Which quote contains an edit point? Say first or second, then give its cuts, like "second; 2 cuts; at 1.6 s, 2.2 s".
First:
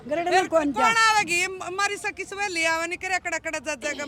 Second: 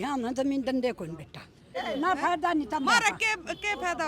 second; 1 cut; at 1.8 s